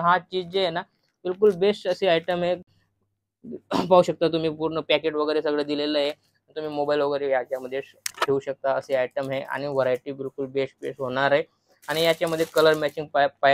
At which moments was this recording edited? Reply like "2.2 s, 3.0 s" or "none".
none